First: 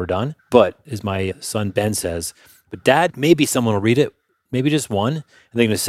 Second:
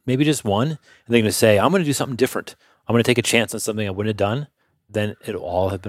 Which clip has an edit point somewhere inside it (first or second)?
second